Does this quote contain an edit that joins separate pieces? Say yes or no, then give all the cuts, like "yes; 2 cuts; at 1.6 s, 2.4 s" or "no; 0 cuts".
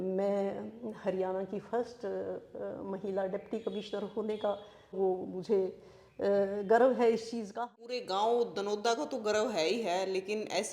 yes; 2 cuts; at 5.0 s, 7.6 s